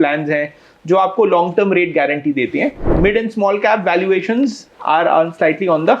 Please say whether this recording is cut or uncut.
cut